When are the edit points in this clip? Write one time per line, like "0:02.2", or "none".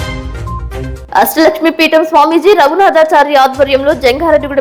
none